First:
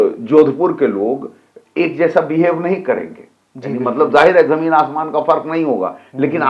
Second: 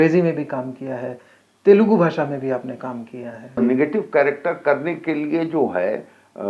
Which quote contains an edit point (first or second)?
second